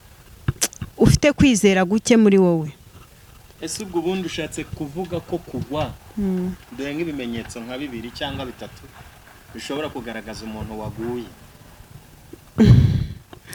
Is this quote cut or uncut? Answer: uncut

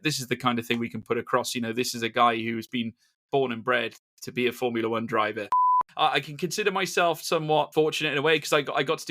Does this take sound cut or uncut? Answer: cut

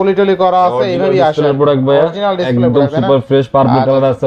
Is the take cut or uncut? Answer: uncut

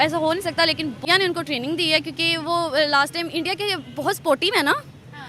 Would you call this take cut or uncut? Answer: cut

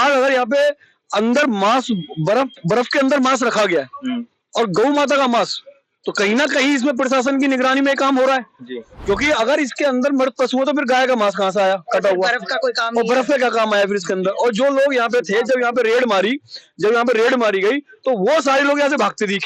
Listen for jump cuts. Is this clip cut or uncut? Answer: uncut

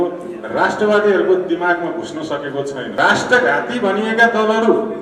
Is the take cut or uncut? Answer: cut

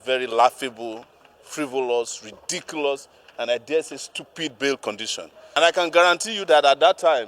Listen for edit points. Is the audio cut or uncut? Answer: cut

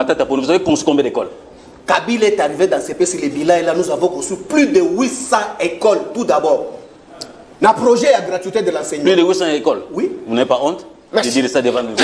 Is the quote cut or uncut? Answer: uncut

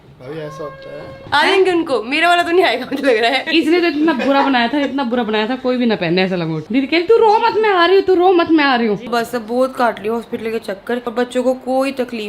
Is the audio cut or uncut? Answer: cut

